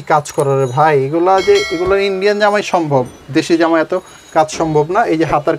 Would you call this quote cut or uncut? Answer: uncut